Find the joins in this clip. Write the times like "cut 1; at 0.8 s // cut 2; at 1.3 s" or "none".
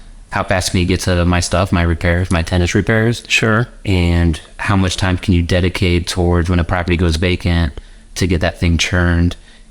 none